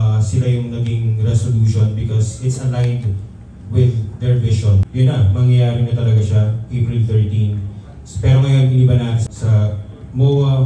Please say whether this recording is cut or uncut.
cut